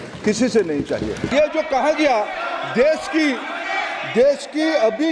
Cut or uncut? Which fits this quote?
cut